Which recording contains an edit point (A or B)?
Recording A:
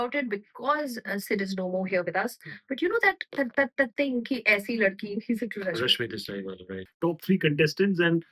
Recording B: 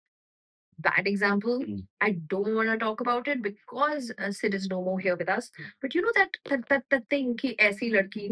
A